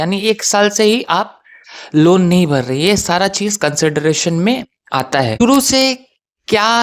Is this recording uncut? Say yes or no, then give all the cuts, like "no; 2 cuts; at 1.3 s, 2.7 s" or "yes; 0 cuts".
no; 1 cut; at 5.4 s